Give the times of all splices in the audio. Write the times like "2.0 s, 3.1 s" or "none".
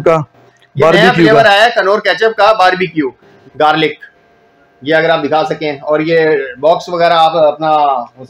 3.3 s